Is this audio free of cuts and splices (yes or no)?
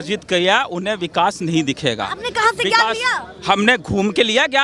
yes